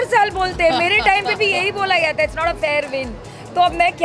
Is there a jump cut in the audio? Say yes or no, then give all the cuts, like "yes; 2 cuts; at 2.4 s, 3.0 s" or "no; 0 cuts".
no; 0 cuts